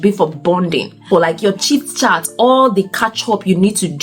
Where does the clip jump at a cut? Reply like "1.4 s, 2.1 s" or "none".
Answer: 1.1 s